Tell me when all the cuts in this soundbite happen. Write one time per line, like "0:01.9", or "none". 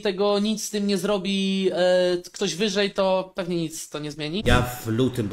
0:04.4

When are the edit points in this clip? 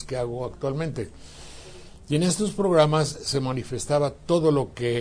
0:00.9

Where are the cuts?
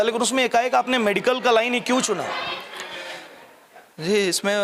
none

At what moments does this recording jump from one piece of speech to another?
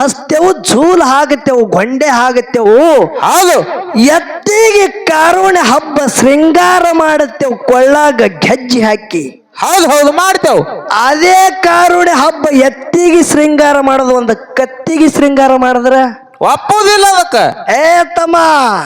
none

